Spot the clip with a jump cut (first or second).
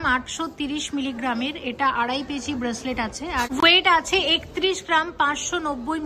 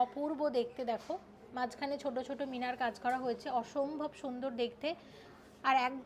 first